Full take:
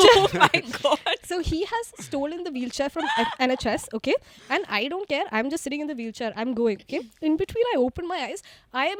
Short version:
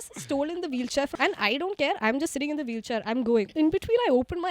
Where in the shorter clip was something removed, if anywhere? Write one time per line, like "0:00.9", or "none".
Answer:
0:01.1
0:03.5